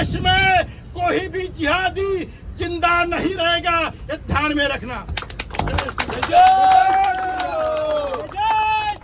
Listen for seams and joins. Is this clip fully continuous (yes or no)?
yes